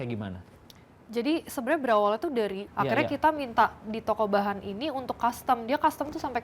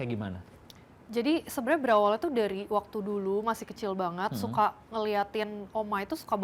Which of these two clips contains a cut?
first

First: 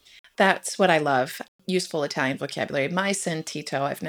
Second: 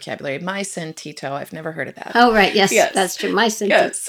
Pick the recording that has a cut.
first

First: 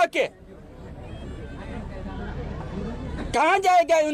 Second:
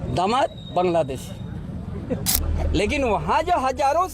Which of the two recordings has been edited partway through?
second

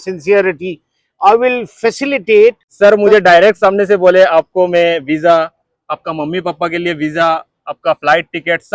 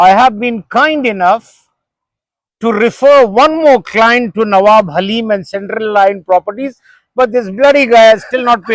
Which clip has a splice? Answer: first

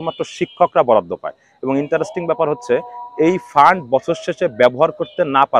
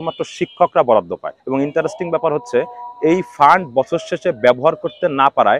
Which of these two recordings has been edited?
second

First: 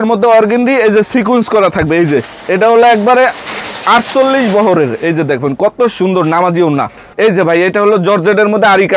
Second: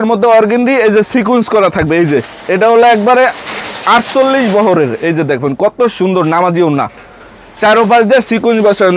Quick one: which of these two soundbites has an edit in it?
first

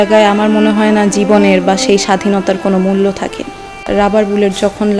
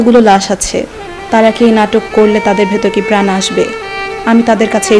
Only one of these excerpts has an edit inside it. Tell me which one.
first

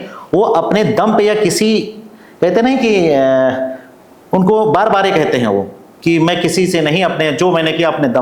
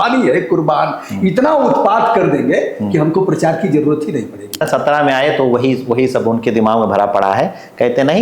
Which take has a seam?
second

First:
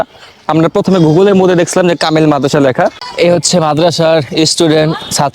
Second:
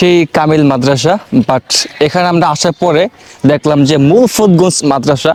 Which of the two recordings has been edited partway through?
first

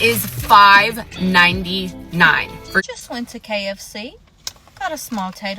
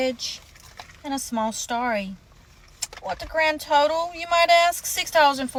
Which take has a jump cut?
first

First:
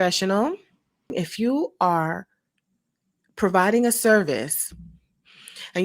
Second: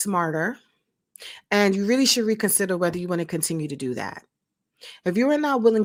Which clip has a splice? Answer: first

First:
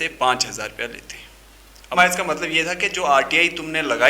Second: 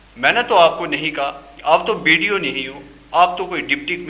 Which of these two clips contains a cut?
first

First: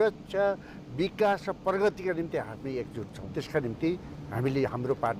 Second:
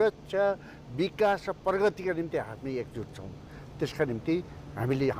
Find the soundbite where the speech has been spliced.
first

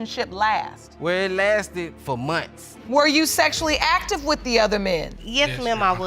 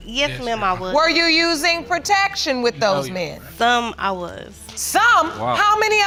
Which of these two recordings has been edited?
first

